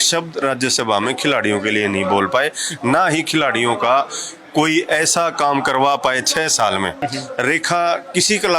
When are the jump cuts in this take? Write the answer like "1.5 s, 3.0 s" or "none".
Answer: 7.0 s